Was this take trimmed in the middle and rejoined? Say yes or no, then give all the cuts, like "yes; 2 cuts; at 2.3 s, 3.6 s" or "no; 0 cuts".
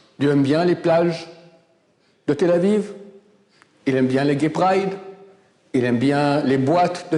no; 0 cuts